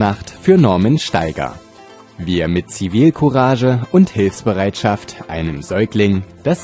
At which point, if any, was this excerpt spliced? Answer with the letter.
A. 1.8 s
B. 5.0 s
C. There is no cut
C